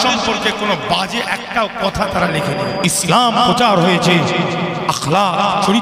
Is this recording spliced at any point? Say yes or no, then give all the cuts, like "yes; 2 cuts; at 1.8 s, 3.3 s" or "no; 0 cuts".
yes; 1 cut; at 2.4 s